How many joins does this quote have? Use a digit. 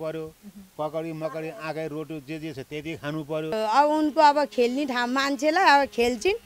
1